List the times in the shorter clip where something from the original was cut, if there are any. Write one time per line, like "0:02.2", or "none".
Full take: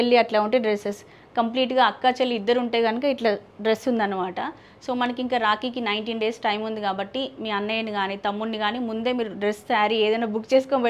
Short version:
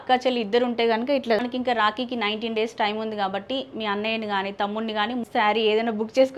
0:01.4
0:05.3

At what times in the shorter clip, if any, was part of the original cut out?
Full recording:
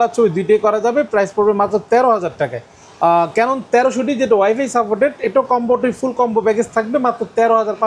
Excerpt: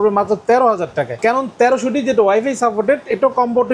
0:01.2

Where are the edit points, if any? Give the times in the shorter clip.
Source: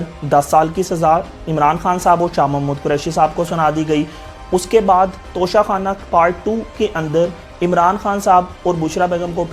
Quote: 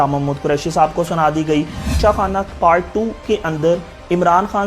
0:02.0

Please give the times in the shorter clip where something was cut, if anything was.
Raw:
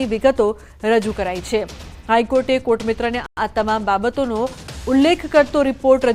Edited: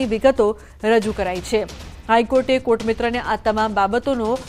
0:03.2

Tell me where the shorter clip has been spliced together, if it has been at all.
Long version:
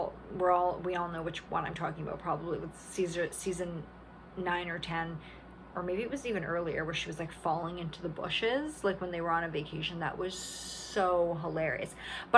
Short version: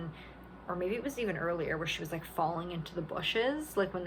none

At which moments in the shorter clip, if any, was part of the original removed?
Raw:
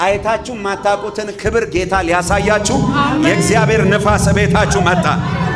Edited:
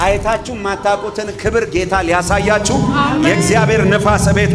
none

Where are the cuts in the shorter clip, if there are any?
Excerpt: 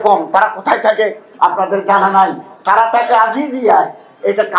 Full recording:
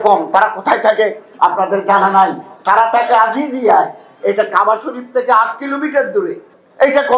none

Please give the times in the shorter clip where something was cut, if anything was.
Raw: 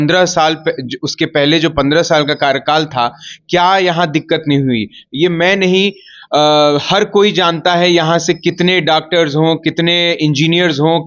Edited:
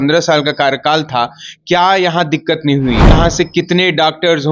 0:03.1

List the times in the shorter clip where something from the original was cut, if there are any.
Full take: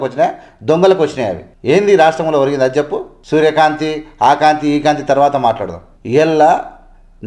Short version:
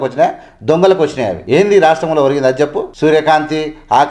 0:01.4
0:02.9

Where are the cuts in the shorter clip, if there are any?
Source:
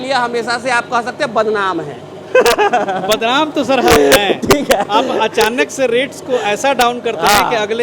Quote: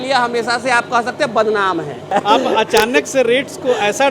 0:02.1

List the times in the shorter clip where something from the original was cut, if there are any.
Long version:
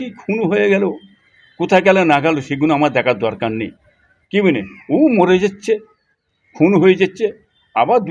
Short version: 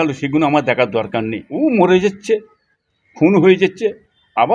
0:01.4

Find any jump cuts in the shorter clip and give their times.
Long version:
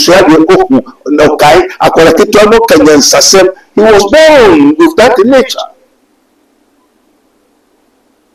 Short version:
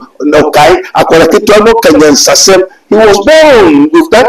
none

